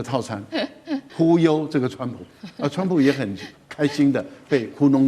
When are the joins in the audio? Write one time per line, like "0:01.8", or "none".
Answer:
0:01.1